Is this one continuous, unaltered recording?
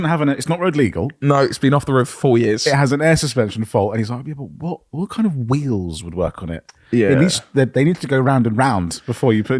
yes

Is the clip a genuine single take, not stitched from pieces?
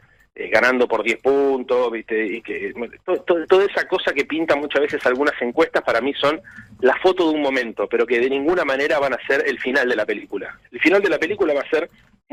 yes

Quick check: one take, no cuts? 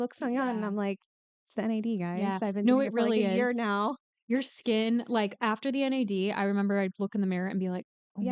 yes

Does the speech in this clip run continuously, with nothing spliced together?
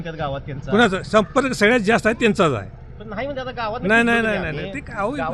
yes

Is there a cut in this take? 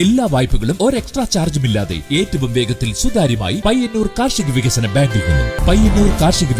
yes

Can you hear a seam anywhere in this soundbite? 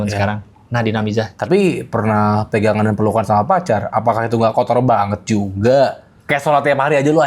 yes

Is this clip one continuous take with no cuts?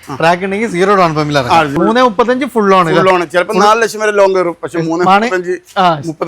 no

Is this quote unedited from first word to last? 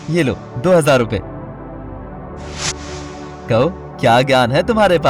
no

